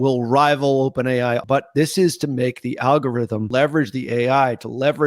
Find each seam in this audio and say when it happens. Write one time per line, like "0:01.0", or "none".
0:01.4
0:03.5